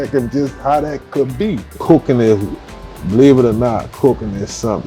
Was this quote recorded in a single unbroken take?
no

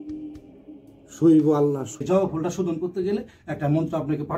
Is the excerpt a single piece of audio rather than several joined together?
no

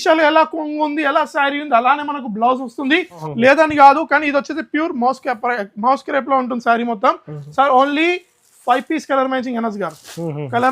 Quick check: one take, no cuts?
no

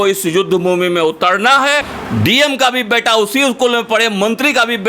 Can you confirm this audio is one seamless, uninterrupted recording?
no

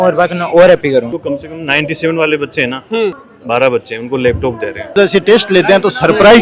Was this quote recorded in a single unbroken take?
no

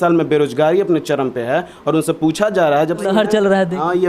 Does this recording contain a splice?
yes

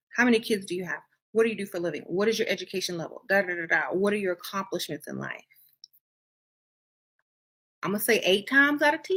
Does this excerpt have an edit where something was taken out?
no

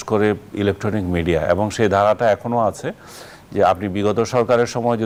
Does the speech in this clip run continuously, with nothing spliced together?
yes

